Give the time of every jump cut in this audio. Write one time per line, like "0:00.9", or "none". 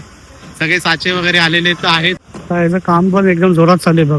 0:02.3